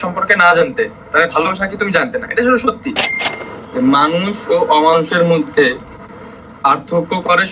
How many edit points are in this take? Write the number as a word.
one